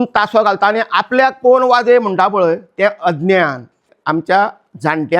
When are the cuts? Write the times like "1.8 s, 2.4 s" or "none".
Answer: 3.9 s